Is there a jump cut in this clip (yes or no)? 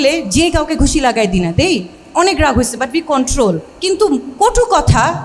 yes